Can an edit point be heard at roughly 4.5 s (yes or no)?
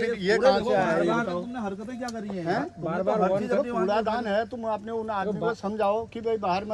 no